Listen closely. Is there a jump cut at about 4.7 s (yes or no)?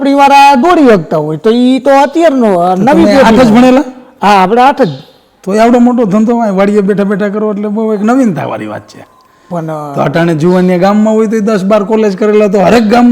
no